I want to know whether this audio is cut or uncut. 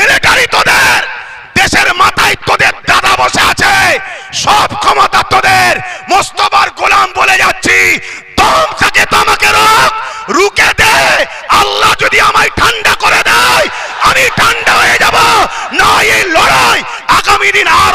uncut